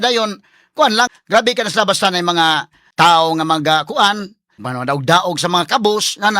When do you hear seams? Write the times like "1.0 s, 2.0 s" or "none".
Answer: 1.1 s, 2.8 s, 4.6 s